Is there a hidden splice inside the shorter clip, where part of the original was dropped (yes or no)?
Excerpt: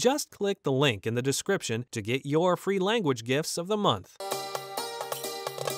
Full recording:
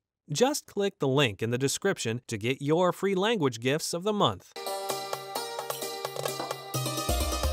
yes